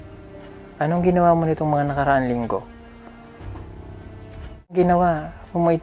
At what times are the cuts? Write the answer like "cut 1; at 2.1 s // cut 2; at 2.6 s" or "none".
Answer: cut 1; at 4.7 s